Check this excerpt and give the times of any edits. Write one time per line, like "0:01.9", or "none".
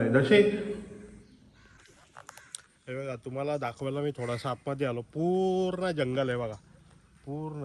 0:01.7